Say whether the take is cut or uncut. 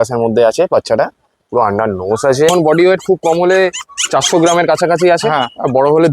cut